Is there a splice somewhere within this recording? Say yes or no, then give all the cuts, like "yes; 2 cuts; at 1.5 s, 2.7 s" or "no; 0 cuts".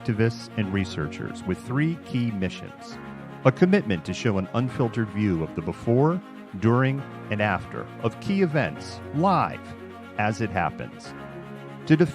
yes; 1 cut; at 10.4 s